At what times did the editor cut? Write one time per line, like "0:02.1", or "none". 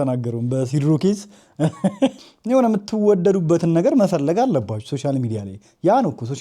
0:02.1